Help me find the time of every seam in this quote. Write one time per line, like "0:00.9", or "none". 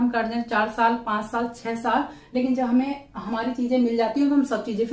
none

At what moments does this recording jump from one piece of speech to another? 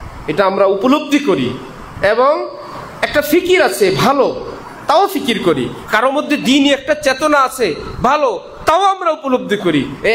none

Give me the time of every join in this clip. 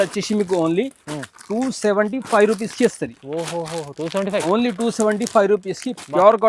none

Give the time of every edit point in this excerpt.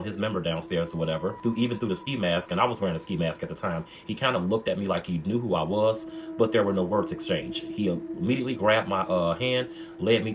0:01.4

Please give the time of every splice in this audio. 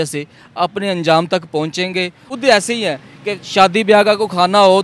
0:02.2

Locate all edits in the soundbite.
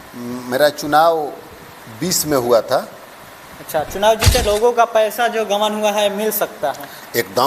0:04.4

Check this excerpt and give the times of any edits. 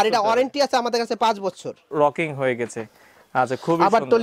0:01.9

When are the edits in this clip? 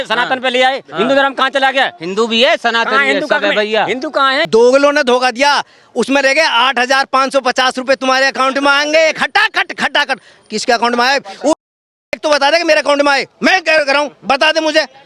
0:04.5

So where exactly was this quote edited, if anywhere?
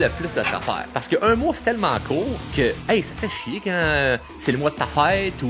0:00.9
0:02.4

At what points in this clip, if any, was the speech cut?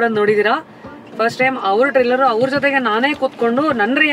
none

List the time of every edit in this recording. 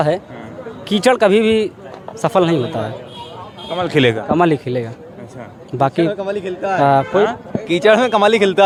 none

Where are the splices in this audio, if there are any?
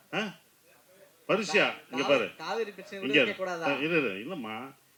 none

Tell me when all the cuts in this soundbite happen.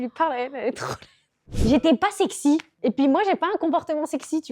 0:01.6
0:02.7

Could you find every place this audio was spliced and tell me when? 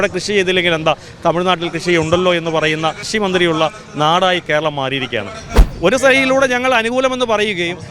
0:03.0
0:05.5

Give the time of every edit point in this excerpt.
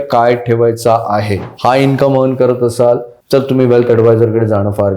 0:01.5
0:03.1

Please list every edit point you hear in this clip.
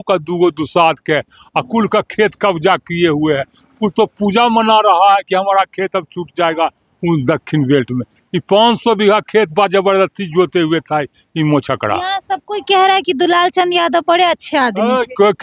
none

